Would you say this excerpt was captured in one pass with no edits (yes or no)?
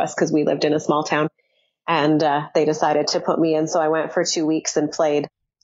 yes